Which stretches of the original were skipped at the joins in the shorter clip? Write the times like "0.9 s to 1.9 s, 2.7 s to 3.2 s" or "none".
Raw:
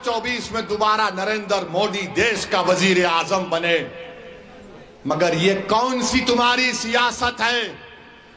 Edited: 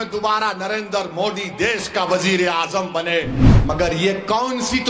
4.0 s to 4.9 s